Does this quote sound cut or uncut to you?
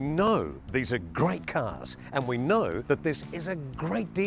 cut